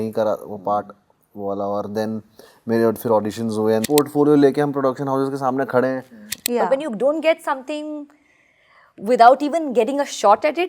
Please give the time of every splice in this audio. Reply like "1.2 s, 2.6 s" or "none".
3.8 s, 6.3 s